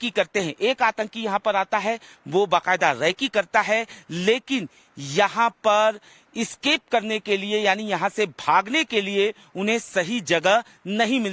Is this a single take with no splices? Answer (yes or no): yes